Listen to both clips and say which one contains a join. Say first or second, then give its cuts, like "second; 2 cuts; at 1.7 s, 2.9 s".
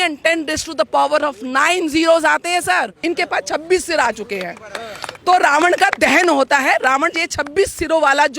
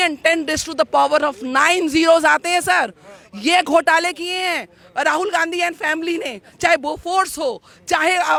first; 1 cut; at 3.0 s